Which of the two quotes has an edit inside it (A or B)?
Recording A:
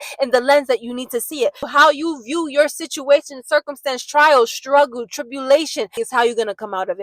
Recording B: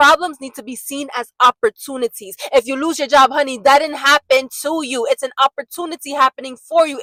A